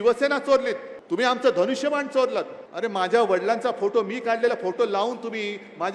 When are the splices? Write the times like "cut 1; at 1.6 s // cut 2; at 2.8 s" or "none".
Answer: cut 1; at 0.9 s // cut 2; at 2.6 s